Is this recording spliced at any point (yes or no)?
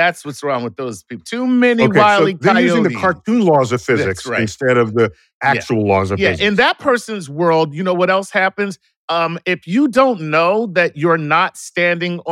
no